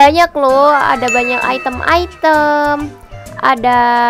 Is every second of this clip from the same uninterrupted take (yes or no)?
yes